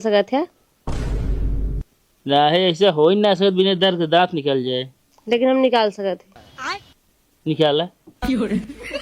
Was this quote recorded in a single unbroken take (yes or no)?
no